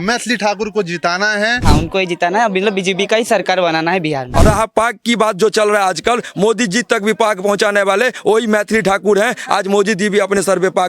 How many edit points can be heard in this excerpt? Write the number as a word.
two